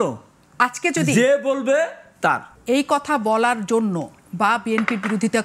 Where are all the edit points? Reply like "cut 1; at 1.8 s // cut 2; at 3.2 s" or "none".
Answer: cut 1; at 2.5 s